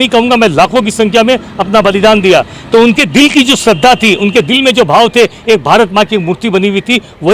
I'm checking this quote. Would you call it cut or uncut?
uncut